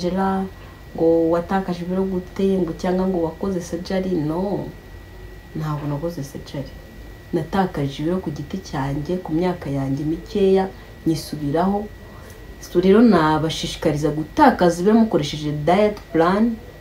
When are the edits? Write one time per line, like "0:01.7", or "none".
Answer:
none